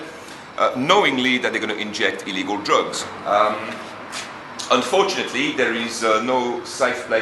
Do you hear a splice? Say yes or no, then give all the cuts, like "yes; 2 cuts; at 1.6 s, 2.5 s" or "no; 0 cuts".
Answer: no; 0 cuts